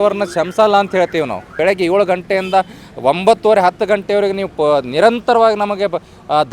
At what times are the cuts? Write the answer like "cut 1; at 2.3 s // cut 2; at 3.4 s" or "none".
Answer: cut 1; at 1.5 s